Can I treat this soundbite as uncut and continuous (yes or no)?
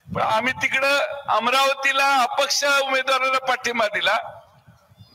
yes